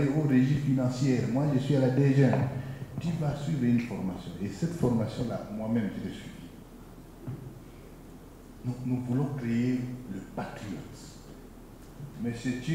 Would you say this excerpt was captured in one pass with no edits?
no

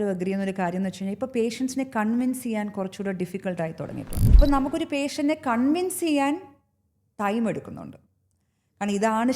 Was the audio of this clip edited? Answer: yes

